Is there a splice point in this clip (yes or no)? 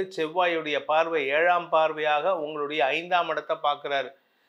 no